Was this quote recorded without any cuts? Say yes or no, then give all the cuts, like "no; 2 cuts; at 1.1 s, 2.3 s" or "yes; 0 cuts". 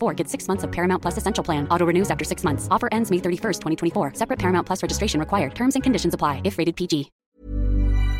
no; 1 cut; at 7.2 s